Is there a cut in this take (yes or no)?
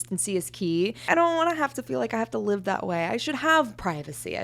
yes